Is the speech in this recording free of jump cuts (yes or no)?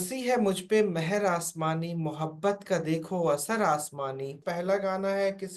no